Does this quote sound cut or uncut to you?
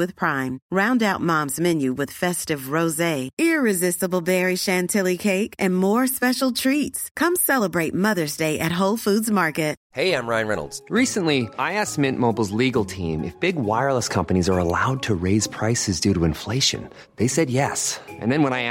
cut